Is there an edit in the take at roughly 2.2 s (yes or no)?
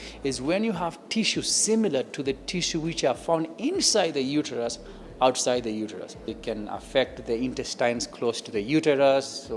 no